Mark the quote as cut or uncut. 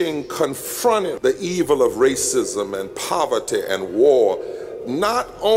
cut